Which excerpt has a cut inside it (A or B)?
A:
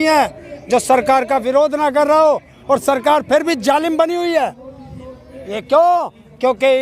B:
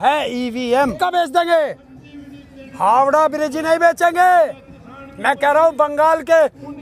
B